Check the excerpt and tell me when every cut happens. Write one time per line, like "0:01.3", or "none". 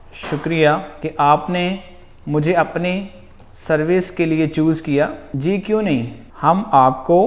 0:01.0
0:05.2
0:06.2